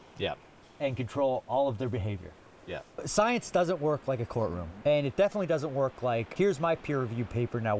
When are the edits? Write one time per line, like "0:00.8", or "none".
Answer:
0:02.9
0:04.7
0:06.3